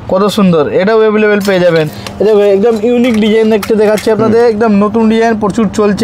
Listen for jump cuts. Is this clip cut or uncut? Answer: cut